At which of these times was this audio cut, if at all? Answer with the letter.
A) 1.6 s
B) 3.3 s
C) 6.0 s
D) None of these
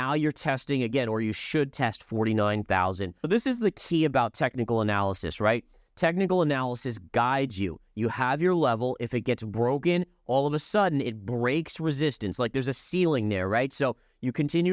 B